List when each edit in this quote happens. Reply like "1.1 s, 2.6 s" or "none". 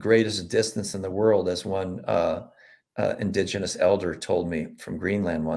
none